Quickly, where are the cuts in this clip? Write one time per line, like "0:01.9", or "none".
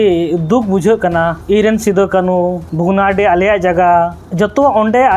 0:01.4
0:02.7
0:04.2

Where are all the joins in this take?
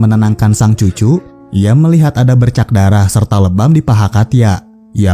none

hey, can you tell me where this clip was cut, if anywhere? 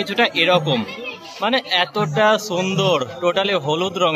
none

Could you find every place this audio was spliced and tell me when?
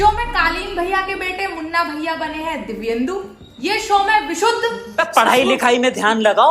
0:04.8

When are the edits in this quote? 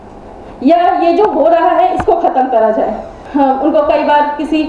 0:03.2

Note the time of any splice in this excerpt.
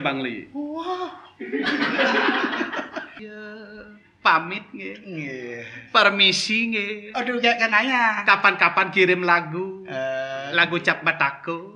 0:03.2

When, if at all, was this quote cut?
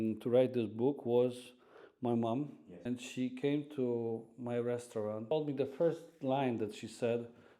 0:02.6
0:05.3

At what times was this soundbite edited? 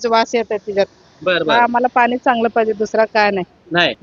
none

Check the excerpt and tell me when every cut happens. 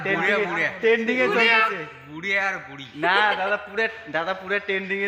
none

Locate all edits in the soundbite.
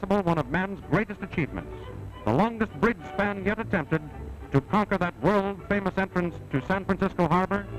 0:03.2

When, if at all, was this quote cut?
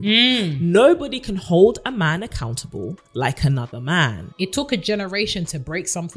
0:04.2

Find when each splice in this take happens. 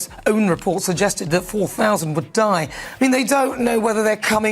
0:02.8

